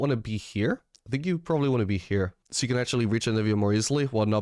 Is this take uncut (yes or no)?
no